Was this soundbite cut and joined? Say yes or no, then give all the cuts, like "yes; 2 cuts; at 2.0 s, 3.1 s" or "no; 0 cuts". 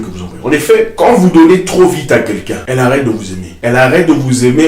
yes; 3 cuts; at 0.9 s, 2.6 s, 3.4 s